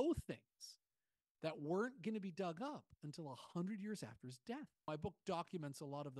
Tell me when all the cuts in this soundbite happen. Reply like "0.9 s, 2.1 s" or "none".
4.8 s

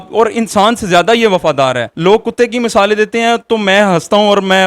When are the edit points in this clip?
1.9 s

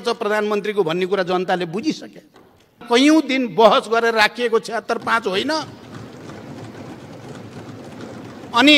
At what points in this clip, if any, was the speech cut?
2.8 s

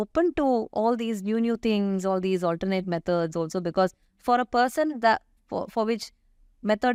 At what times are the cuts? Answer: none

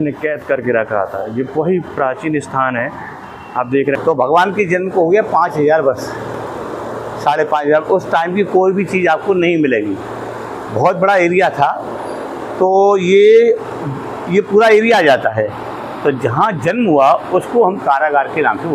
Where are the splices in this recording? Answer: 4.0 s

